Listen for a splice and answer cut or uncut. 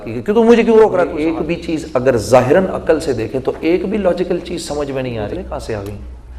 cut